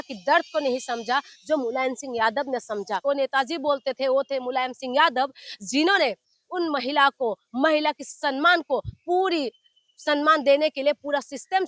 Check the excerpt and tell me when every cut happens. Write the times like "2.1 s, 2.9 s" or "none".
2.9 s